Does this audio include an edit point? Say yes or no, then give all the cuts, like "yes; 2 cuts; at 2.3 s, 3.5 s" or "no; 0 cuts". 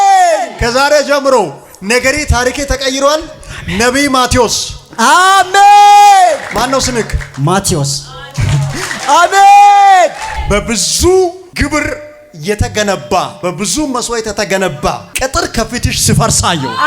yes; 5 cuts; at 6.5 s, 10.2 s, 11.4 s, 13.3 s, 15.1 s